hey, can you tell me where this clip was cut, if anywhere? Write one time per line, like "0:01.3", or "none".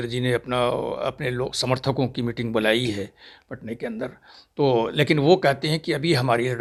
none